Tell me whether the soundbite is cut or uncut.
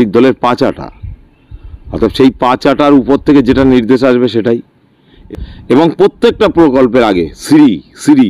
cut